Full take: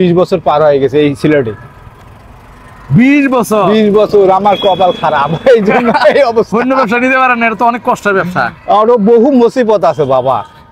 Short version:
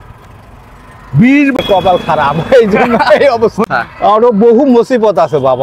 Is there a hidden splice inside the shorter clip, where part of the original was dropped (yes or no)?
yes